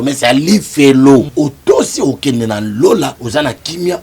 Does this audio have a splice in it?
yes; 2 cuts; at 1.3 s, 3.2 s

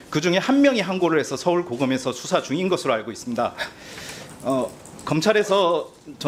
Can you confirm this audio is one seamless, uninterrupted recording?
yes; 0 cuts

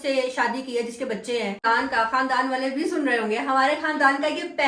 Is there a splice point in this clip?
yes; 1 cut; at 1.6 s

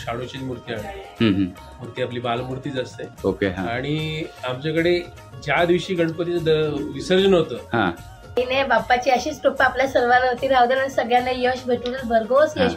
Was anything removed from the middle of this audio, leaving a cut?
yes; 1 cut; at 8.4 s

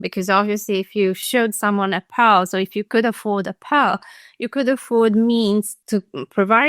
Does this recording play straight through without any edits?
no; 2 cuts; at 1.2 s, 5.8 s

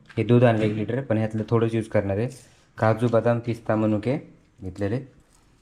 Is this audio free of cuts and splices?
yes; 0 cuts

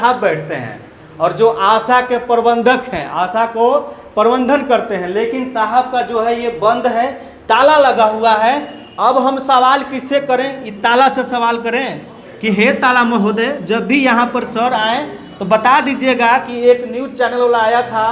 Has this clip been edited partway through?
no; 0 cuts

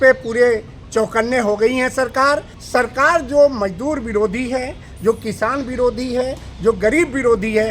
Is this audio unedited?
no; 1 cut; at 2.5 s

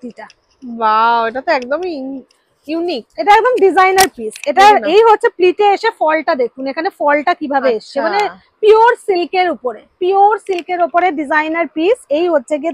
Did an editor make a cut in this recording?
no; 0 cuts

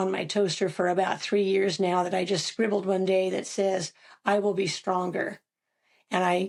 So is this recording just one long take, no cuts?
yes; 0 cuts

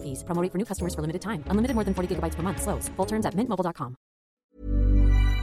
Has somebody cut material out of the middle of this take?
yes; 1 cut; at 4.3 s

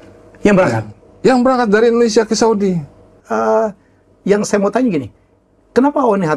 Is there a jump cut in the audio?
yes; 1 cut; at 3.2 s

